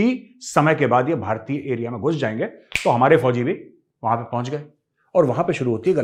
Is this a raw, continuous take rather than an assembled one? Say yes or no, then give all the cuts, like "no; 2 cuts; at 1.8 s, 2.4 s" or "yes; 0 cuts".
yes; 0 cuts